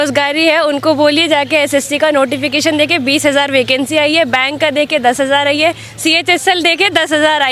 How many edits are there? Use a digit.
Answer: 0